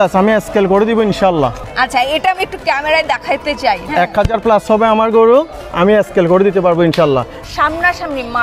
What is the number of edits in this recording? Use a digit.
2